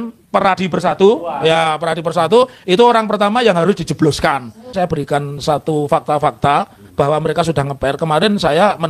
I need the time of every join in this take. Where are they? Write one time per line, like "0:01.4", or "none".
0:04.8